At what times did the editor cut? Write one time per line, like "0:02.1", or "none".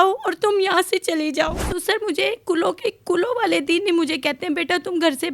0:01.7